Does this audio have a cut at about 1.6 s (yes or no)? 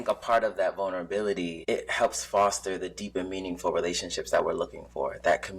yes